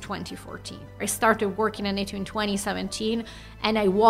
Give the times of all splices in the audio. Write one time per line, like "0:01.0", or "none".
0:01.0

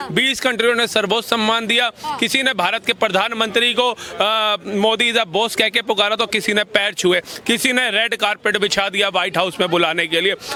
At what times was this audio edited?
none

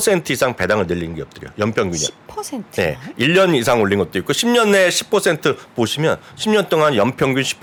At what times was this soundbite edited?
none

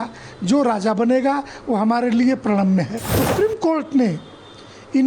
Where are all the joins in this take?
0:03.2

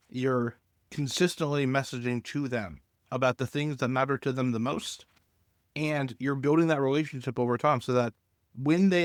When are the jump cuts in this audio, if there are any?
none

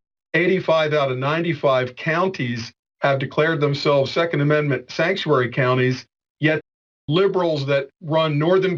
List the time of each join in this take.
0:06.7

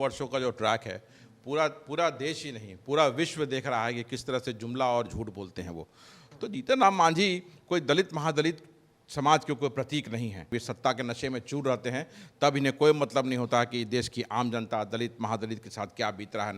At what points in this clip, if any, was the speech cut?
0:06.2
0:10.6

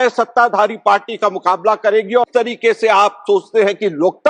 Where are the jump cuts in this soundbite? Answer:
0:02.3

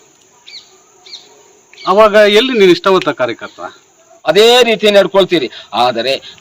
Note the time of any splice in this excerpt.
0:04.1

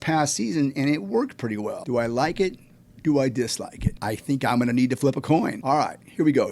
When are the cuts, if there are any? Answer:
0:01.8
0:04.0
0:05.6

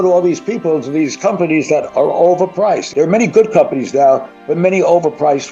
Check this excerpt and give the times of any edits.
none

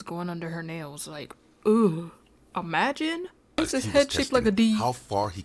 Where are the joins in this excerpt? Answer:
0:03.6

